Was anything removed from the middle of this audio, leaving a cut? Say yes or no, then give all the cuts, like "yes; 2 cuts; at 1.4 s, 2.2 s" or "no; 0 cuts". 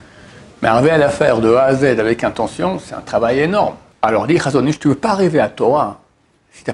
yes; 1 cut; at 3.8 s